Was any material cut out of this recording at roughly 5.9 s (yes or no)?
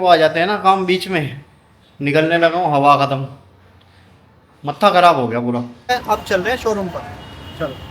yes